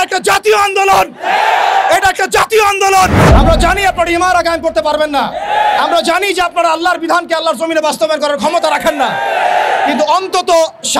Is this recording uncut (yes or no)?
no